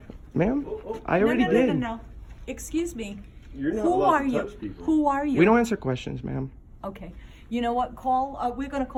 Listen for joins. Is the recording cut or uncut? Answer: uncut